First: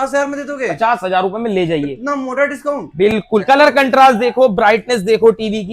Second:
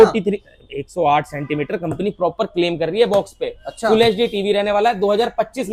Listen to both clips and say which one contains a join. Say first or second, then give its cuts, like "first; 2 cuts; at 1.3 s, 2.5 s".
first; 1 cut; at 3.4 s